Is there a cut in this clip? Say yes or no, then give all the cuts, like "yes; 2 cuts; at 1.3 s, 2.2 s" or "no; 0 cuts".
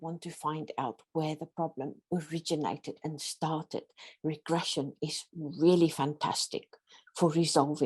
yes; 1 cut; at 2.0 s